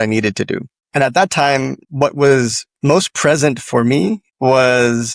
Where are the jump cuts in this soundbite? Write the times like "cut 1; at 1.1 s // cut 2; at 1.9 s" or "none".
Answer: none